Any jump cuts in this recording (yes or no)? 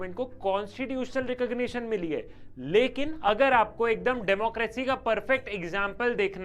yes